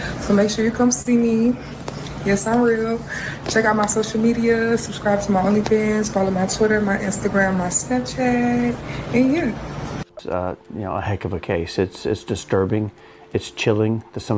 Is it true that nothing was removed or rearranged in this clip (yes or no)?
no